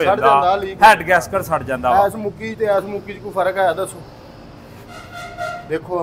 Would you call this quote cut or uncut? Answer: cut